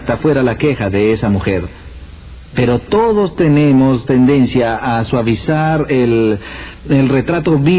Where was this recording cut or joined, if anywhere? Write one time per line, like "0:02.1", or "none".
none